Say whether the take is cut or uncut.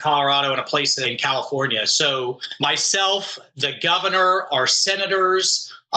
cut